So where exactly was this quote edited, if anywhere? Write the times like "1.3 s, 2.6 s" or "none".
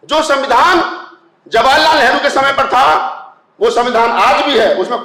none